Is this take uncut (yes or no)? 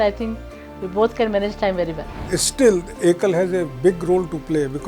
no